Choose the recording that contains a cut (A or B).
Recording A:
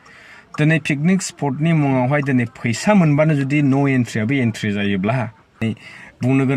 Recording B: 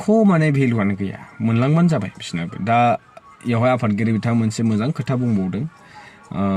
A